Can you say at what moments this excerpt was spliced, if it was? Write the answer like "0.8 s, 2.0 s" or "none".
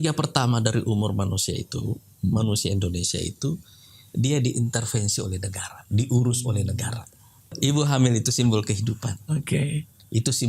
7.6 s